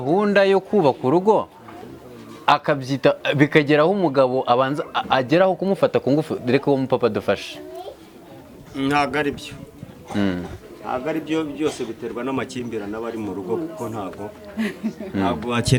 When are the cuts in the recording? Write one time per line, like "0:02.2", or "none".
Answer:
none